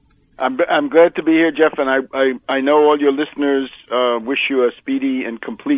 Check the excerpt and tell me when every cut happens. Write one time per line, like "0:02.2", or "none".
none